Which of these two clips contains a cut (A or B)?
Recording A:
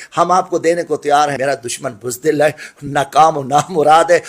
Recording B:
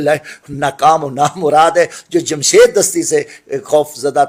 A